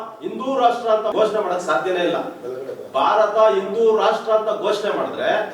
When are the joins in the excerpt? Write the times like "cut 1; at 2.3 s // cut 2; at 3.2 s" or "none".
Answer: cut 1; at 1.1 s